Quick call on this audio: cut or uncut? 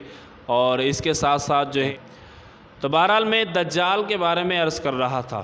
cut